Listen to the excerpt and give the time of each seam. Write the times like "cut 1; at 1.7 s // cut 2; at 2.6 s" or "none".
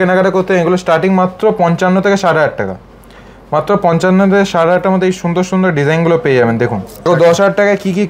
cut 1; at 7.1 s